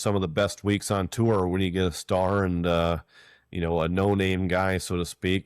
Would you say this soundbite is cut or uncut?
uncut